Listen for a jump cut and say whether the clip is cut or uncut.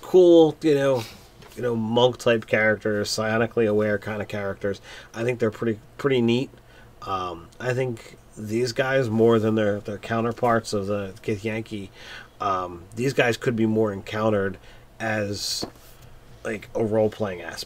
uncut